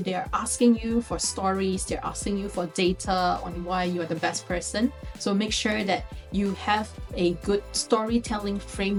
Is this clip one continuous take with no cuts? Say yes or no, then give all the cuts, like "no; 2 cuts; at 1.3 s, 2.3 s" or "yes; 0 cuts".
yes; 0 cuts